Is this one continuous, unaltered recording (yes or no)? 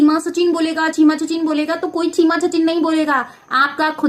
yes